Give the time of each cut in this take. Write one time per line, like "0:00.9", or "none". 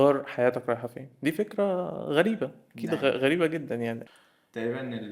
0:04.0